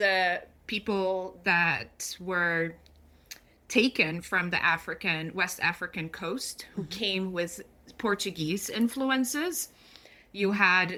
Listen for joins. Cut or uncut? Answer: uncut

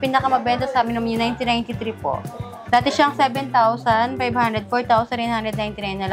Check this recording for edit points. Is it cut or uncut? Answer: uncut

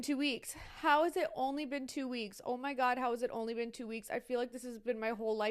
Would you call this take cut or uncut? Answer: uncut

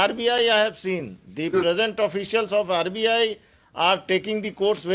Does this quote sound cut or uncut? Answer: uncut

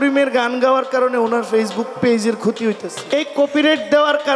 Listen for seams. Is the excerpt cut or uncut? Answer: cut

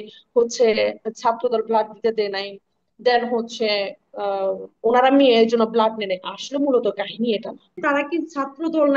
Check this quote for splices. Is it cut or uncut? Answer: cut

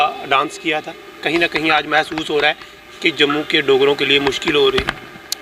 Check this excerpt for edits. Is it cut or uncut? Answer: uncut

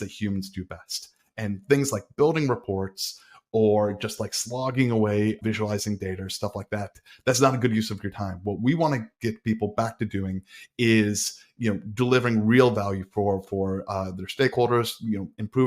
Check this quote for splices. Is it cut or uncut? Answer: cut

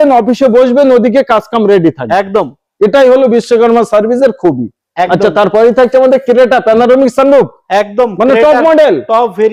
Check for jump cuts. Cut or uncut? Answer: uncut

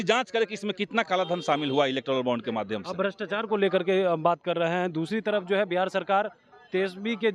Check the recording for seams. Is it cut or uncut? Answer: uncut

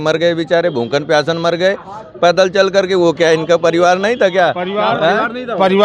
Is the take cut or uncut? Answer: uncut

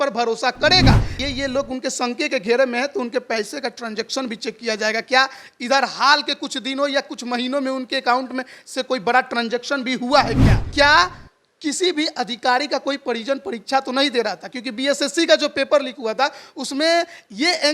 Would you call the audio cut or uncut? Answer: cut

